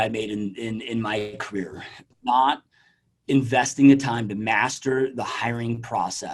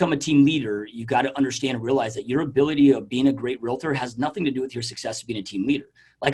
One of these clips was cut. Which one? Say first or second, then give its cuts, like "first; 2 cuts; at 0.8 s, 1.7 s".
first; 1 cut; at 2.0 s